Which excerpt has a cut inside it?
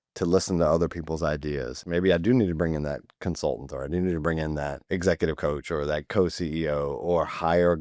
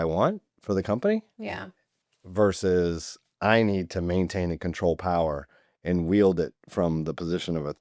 first; 2 cuts; at 1.8 s, 4.8 s

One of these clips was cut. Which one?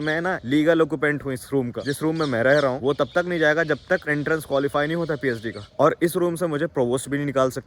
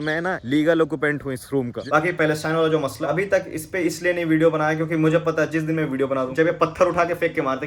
second; 3 cuts; at 1.8 s, 3.0 s, 6.3 s

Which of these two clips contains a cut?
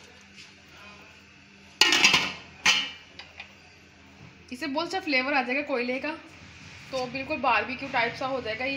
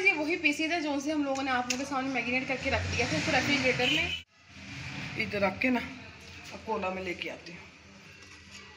second; 1 cut; at 4.1 s

